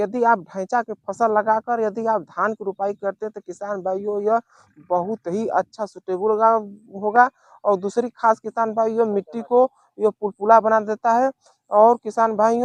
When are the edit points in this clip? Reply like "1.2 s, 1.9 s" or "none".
none